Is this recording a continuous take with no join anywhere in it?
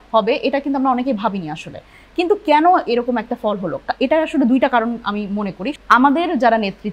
no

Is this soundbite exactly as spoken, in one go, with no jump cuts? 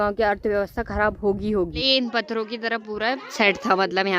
no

